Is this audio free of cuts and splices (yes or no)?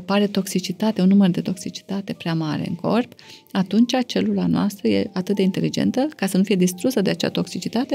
yes